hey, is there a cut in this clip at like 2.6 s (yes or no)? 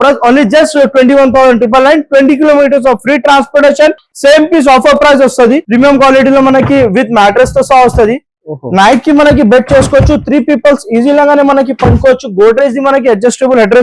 no